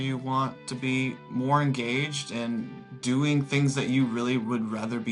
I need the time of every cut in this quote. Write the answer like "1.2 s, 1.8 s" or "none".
none